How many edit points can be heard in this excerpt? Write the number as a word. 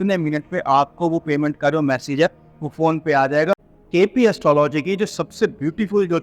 one